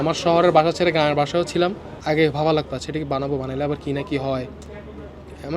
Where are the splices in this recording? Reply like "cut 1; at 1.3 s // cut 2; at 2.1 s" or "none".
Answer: cut 1; at 1.9 s